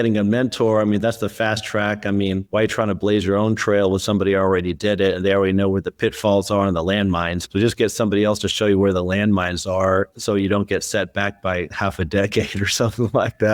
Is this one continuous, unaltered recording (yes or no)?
yes